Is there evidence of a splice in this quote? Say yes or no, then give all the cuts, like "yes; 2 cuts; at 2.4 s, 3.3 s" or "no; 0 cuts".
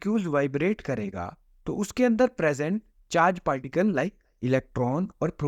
no; 0 cuts